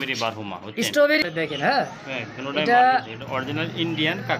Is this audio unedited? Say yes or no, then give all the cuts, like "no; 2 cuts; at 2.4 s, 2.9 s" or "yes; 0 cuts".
no; 1 cut; at 1.2 s